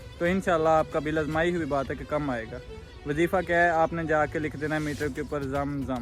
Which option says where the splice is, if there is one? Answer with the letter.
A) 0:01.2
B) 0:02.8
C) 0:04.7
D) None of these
D